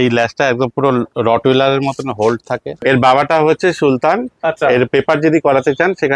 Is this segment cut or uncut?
cut